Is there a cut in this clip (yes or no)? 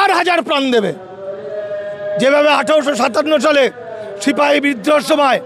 no